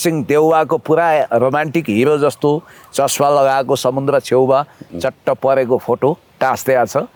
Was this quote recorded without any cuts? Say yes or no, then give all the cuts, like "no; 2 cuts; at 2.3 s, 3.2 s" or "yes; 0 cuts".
yes; 0 cuts